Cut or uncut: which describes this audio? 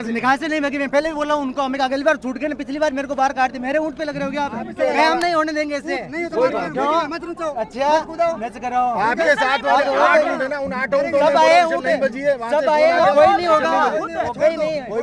cut